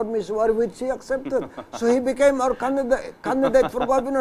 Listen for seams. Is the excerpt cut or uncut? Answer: cut